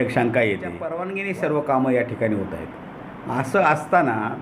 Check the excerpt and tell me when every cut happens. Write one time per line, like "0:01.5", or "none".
0:01.1